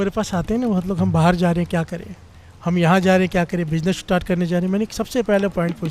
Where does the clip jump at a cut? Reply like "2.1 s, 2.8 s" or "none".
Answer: none